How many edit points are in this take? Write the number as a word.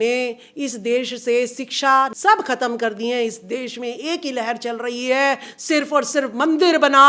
one